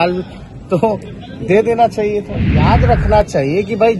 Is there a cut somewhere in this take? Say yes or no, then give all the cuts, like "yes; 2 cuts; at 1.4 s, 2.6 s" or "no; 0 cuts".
yes; 1 cut; at 2.7 s